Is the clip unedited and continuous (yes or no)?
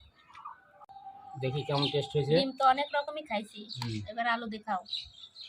no